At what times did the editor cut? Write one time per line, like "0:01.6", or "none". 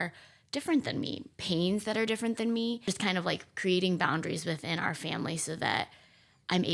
0:02.8